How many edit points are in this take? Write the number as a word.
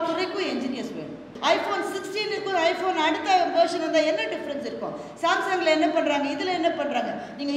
one